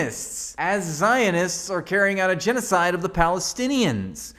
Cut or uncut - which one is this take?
uncut